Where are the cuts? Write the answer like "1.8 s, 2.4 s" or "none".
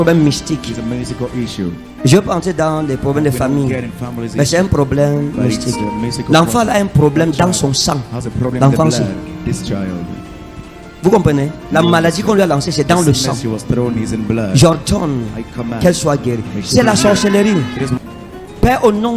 18.0 s